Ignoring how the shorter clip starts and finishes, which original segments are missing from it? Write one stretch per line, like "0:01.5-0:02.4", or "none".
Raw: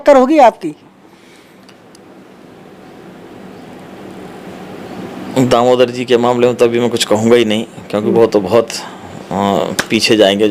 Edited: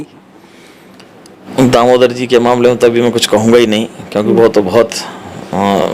0:02.2-0:05.3